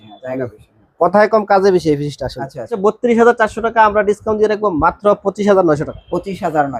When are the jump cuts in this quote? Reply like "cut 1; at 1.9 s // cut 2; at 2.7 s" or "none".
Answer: none